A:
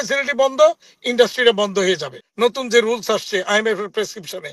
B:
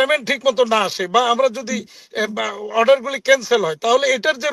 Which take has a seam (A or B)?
A